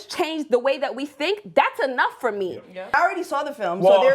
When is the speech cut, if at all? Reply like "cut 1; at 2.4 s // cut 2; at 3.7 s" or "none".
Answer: cut 1; at 2.9 s